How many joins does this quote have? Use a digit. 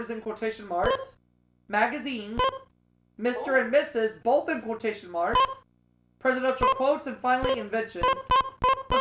1